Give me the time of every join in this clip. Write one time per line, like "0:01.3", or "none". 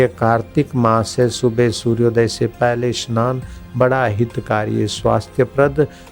none